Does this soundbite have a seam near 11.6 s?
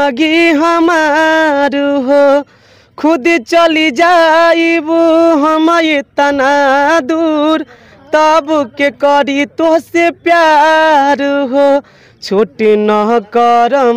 no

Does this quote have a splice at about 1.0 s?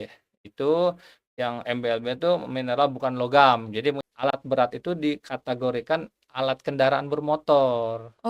no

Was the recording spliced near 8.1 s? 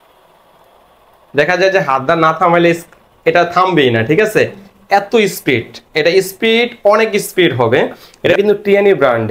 yes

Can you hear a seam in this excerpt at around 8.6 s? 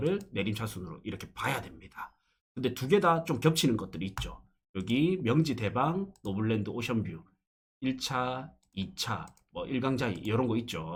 no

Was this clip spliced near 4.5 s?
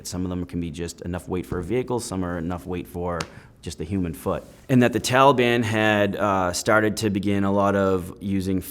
yes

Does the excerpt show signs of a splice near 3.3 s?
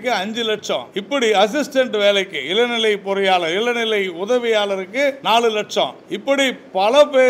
no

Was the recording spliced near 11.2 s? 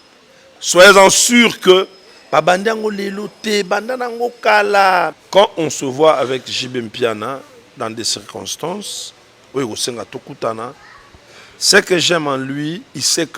no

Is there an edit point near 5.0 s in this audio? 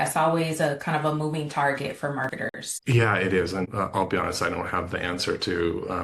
no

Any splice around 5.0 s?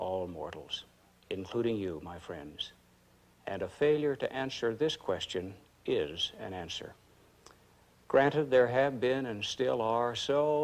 yes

